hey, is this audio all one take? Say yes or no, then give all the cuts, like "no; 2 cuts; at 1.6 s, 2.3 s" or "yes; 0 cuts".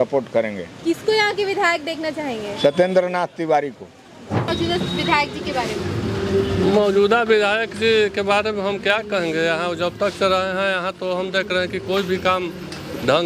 yes; 0 cuts